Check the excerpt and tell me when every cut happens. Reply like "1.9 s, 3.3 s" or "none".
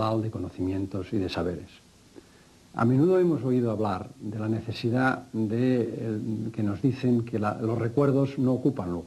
6.2 s